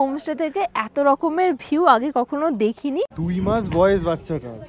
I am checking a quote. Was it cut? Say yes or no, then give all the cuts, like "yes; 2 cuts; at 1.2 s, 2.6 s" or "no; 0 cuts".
yes; 1 cut; at 3.2 s